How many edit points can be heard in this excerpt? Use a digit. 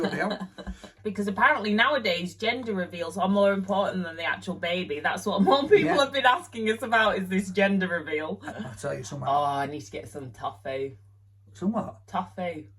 2